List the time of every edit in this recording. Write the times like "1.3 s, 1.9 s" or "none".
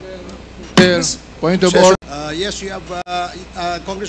2.0 s